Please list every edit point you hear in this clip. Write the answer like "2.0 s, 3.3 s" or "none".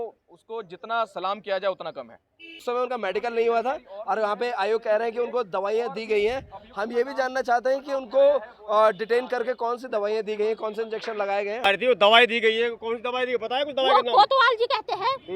2.6 s, 11.6 s